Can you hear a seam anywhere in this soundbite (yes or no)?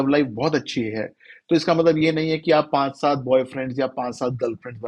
no